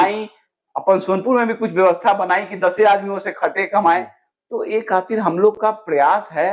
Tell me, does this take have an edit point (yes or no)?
no